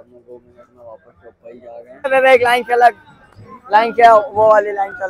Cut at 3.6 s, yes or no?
no